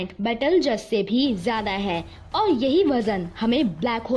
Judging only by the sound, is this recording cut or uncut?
uncut